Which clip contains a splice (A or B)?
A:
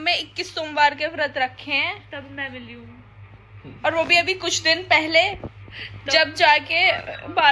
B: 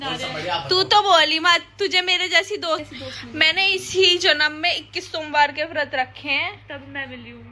B